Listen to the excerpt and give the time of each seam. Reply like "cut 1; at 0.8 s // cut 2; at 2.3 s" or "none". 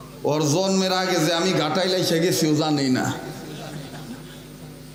none

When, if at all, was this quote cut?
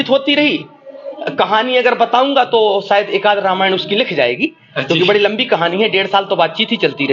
cut 1; at 1.1 s

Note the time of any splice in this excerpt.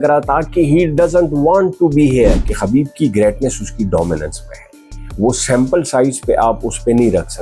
cut 1; at 2.5 s

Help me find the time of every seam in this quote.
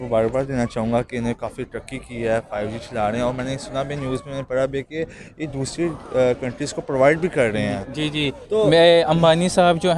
none

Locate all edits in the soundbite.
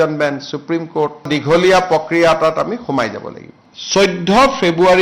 cut 1; at 1.3 s // cut 2; at 3.5 s

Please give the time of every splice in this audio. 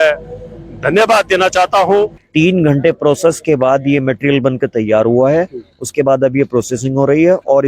cut 1; at 2.2 s

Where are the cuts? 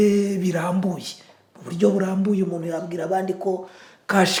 none

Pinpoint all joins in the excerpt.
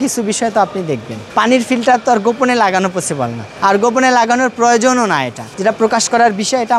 cut 1; at 1.2 s // cut 2; at 3.5 s // cut 3; at 5.5 s

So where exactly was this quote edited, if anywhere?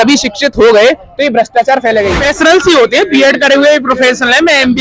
cut 1; at 2.2 s

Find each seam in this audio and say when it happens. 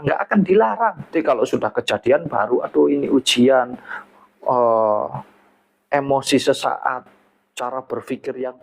cut 1; at 1.1 s

